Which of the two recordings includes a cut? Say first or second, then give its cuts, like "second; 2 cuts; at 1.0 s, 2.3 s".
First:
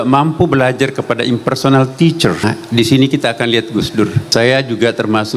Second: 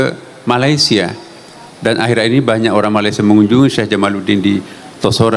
first; 2 cuts; at 2.4 s, 4.2 s